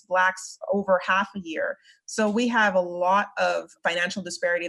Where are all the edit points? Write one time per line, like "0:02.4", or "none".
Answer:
0:03.7